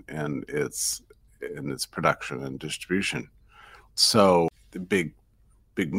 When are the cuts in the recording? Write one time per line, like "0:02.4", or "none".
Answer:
0:04.5